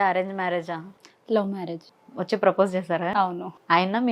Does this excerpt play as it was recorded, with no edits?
no; 1 cut; at 1.9 s

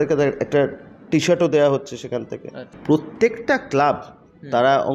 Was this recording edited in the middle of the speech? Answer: yes; 1 cut; at 2.7 s

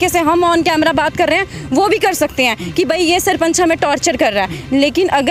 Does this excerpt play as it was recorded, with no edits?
yes; 0 cuts

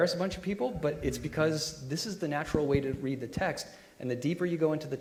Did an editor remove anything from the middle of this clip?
no; 0 cuts

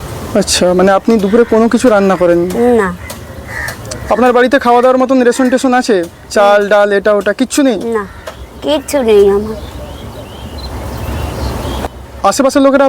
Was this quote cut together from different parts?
yes; 1 cut; at 11.9 s

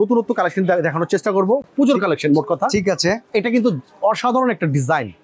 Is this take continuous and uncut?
yes; 0 cuts

